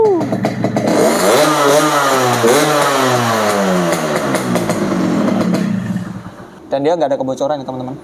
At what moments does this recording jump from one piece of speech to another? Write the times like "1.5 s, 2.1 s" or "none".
6.5 s

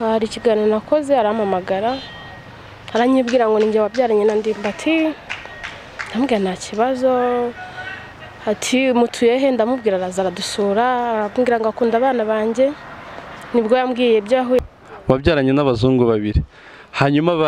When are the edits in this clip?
14.6 s

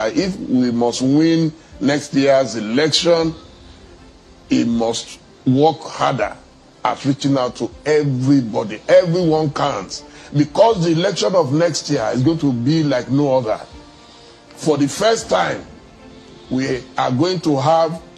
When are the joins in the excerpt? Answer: none

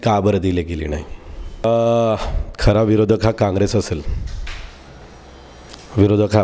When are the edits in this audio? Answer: 1.6 s

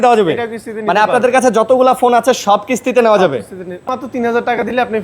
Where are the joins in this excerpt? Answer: 3.8 s

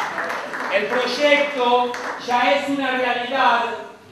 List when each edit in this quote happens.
1.5 s

